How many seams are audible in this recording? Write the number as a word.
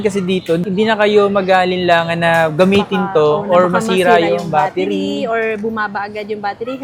zero